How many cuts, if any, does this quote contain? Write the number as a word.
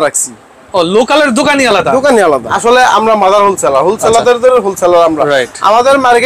one